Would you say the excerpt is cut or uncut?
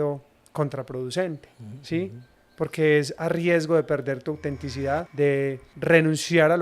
cut